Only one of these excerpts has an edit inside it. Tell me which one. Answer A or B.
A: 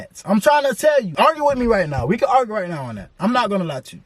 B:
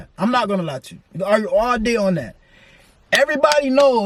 A